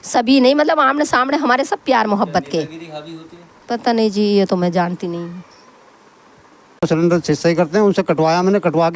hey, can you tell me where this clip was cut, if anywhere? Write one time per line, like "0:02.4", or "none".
0:06.8